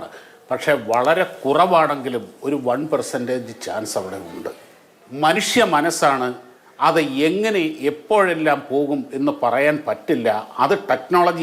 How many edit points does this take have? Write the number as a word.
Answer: one